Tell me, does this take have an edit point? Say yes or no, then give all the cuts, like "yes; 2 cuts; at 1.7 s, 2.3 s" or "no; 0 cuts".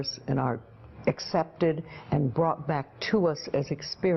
no; 0 cuts